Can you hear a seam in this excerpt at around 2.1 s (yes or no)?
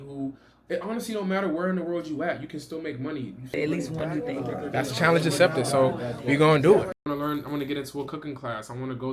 no